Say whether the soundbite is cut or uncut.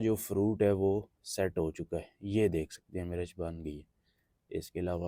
uncut